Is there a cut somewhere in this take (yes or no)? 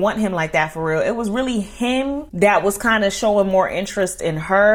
no